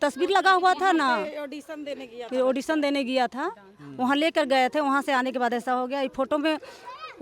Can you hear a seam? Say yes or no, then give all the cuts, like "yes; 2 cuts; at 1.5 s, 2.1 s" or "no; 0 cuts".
no; 0 cuts